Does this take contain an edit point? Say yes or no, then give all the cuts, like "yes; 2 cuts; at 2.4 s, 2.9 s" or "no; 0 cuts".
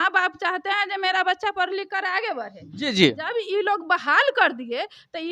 no; 0 cuts